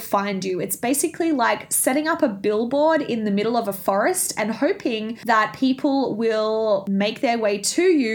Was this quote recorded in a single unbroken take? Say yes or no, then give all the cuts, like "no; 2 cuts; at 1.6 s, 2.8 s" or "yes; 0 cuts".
no; 2 cuts; at 5.1 s, 6.9 s